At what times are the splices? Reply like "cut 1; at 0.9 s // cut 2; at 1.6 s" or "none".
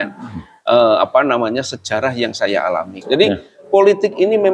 cut 1; at 2.9 s